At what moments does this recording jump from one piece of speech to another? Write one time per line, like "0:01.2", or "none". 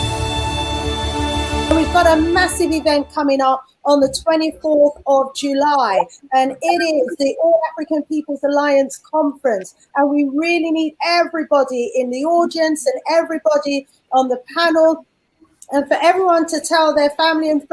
0:01.7